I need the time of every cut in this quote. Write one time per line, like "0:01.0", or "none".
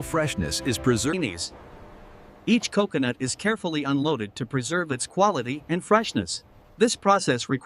0:01.1